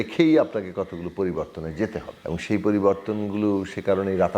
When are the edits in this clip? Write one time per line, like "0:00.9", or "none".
0:02.1